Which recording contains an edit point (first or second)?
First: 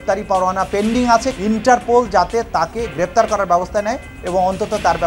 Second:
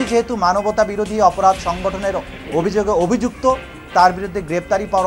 first